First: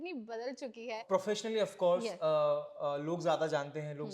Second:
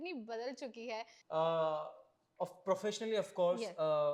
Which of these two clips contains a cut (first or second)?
first